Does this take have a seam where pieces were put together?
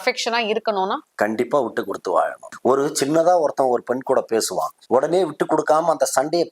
yes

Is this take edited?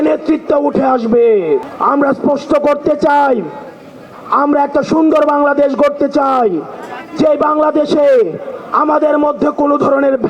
no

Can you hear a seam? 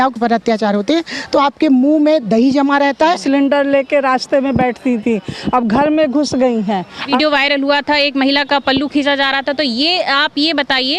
yes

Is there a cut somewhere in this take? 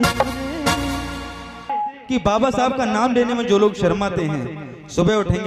yes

